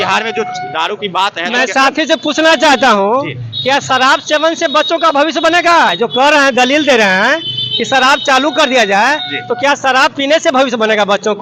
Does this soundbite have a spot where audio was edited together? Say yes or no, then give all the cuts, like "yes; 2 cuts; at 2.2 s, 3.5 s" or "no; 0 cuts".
no; 0 cuts